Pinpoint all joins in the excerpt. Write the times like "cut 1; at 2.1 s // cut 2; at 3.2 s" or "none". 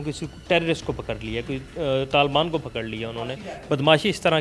none

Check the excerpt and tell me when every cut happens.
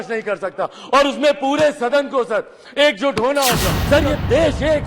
cut 1; at 3.7 s

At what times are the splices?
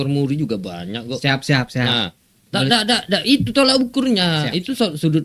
none

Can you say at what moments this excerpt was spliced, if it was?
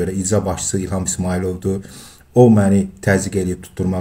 none

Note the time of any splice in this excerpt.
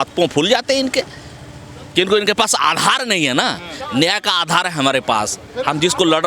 none

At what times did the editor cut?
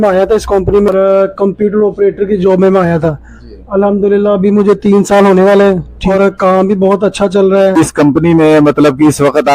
cut 1; at 0.9 s // cut 2; at 6.0 s // cut 3; at 7.8 s

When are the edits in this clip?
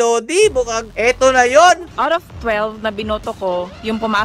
cut 1; at 1.9 s

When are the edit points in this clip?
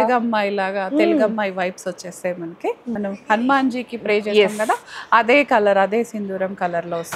cut 1; at 3.0 s

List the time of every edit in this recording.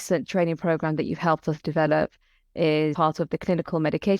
cut 1; at 2.9 s

